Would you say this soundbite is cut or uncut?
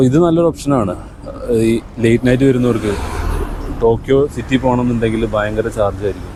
uncut